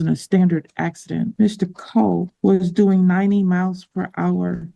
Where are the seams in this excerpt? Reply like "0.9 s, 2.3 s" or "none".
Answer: 1.3 s, 2.3 s